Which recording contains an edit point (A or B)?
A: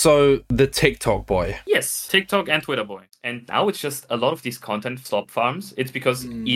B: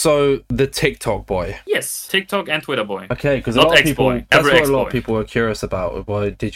A